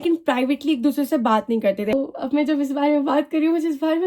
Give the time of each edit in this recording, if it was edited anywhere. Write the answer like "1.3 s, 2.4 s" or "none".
1.9 s